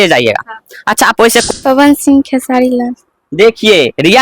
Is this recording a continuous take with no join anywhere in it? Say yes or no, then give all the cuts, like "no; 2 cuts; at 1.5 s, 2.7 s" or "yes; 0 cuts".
no; 1 cut; at 1.5 s